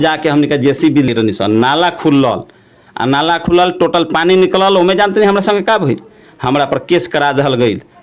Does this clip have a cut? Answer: yes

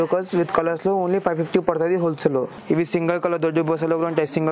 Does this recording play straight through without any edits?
no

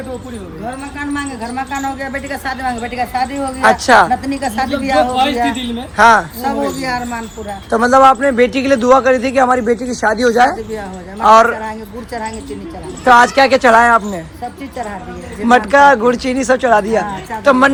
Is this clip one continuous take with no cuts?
yes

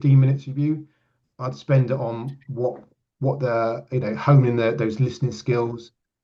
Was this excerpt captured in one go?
yes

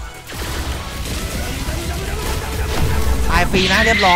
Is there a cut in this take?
no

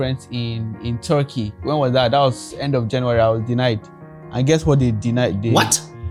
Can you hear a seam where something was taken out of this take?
no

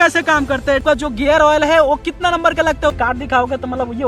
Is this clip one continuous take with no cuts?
no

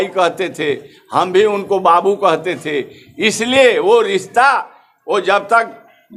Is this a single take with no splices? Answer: yes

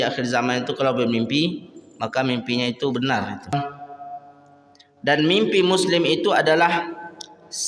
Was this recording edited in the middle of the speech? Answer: yes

